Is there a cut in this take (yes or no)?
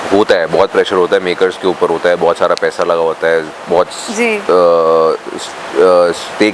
no